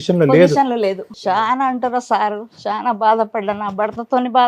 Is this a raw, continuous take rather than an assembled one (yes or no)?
no